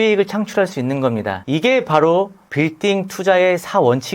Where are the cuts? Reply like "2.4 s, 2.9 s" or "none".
1.4 s